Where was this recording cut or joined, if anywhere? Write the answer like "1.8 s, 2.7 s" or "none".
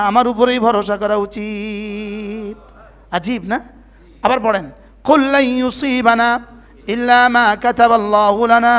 none